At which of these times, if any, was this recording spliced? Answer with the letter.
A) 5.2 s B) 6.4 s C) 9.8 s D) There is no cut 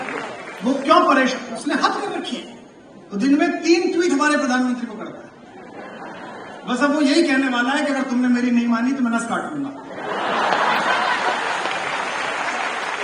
D